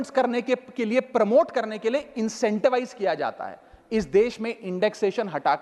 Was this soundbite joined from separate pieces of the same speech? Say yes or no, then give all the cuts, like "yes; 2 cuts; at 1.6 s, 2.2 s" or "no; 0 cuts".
no; 0 cuts